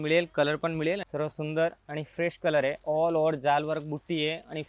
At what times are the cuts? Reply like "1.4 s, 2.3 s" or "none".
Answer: 1.0 s